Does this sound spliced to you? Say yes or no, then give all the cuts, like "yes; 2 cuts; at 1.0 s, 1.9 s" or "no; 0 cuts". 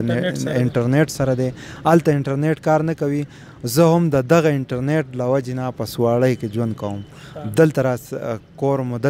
no; 0 cuts